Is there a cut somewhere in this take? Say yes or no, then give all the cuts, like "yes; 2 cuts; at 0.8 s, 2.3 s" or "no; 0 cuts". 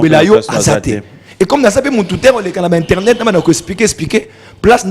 no; 0 cuts